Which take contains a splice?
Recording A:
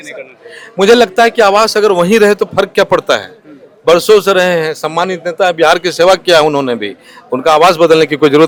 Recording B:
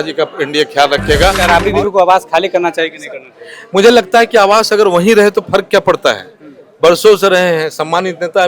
B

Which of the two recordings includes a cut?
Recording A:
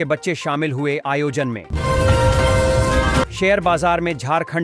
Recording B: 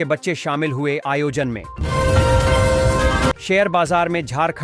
B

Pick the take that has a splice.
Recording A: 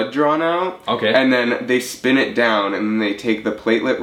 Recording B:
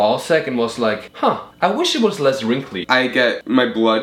B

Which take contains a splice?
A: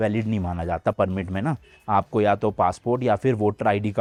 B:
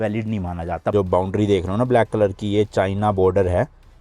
B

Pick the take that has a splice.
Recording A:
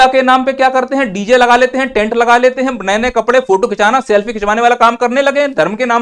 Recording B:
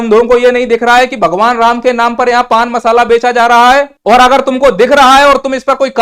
B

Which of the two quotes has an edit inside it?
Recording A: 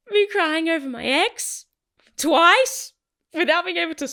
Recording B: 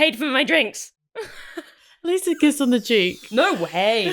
B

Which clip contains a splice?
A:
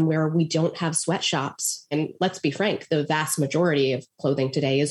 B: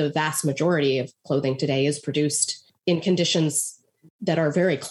A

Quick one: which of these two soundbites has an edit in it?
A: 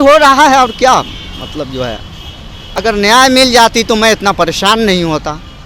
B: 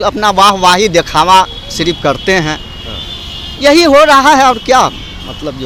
A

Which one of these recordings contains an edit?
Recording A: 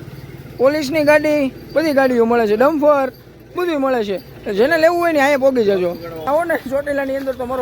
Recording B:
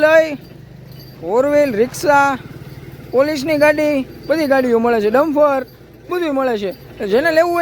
A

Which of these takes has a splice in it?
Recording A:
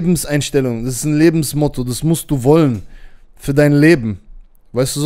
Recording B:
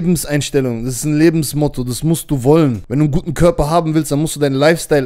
B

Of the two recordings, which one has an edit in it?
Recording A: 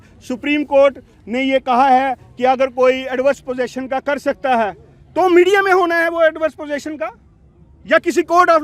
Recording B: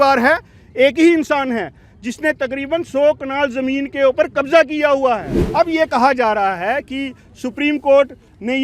B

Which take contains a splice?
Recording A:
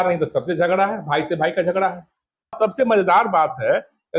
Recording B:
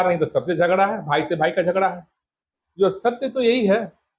A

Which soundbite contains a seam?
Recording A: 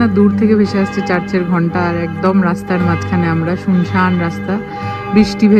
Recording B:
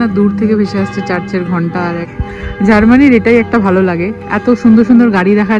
B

